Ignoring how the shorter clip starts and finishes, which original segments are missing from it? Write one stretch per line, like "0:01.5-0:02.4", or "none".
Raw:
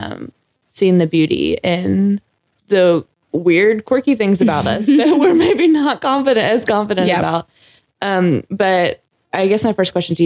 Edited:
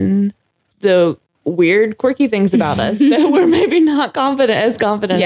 none